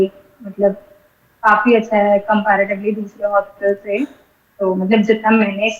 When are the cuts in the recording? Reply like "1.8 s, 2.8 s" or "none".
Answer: none